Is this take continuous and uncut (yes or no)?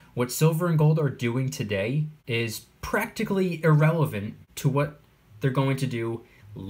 no